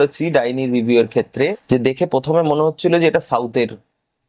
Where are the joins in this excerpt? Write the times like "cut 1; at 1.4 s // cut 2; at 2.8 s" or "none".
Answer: cut 1; at 1.6 s